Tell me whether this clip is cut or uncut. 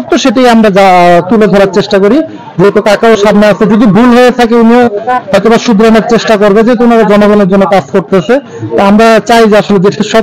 uncut